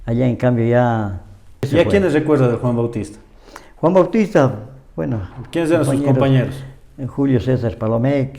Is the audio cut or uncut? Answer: cut